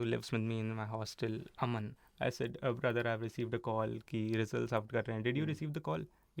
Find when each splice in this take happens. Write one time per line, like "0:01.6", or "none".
0:02.0